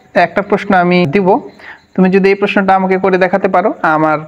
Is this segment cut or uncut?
cut